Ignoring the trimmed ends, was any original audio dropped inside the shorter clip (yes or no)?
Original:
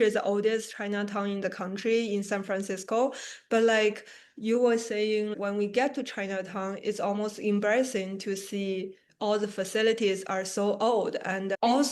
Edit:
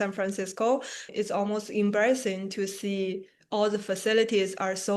yes